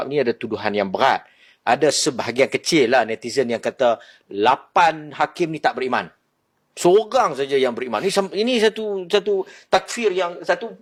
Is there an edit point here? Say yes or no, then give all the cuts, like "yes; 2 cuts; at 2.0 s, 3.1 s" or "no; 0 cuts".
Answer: no; 0 cuts